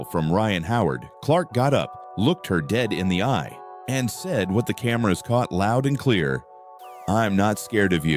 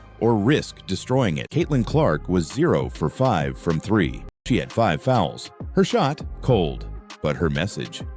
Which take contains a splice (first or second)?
second